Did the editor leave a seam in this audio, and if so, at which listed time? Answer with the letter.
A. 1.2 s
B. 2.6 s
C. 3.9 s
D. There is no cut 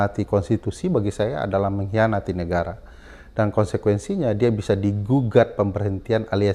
D